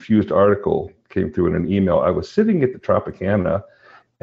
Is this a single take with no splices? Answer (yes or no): yes